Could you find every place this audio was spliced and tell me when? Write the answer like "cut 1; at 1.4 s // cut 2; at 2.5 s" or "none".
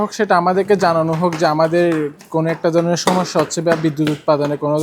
none